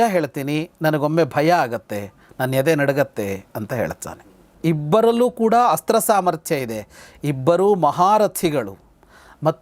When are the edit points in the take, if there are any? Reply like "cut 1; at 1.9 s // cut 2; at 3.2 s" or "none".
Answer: cut 1; at 4.4 s